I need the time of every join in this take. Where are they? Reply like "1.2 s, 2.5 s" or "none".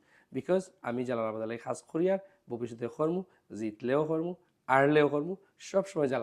none